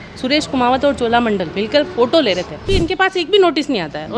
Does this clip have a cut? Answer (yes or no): yes